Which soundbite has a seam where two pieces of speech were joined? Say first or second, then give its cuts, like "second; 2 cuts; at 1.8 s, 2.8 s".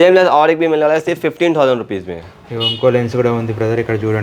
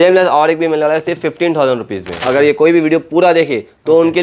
second; 1 cut; at 2.1 s